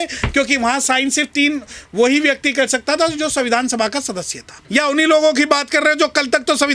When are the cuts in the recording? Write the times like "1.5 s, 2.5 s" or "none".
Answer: 4.5 s